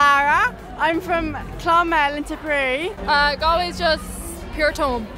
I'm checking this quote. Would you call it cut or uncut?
uncut